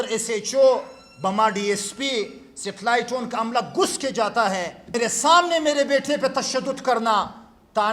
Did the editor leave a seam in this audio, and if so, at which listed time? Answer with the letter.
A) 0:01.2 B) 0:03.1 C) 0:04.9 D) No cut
C